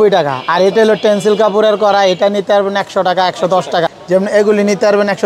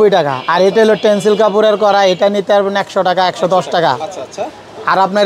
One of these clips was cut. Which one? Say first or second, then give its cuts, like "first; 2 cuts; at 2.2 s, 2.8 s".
first; 1 cut; at 3.9 s